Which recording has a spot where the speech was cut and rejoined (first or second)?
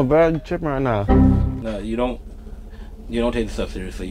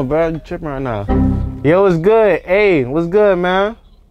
first